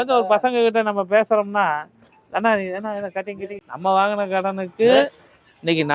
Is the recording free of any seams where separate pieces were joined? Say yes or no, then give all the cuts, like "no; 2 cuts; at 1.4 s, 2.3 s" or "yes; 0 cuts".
no; 1 cut; at 3.6 s